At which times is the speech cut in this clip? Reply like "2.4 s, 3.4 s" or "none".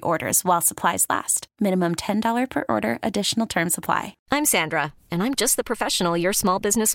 4.1 s